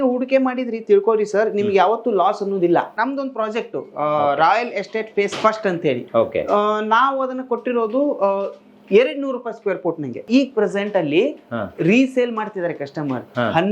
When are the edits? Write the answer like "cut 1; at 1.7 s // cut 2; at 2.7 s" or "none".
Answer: cut 1; at 2.9 s // cut 2; at 10.2 s